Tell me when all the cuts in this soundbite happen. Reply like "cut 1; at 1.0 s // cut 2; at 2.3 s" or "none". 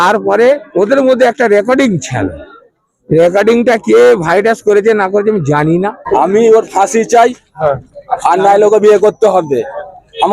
cut 1; at 6.0 s